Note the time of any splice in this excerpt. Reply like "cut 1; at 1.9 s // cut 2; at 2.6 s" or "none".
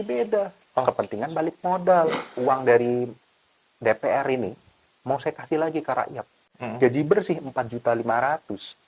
cut 1; at 2.2 s // cut 2; at 6.6 s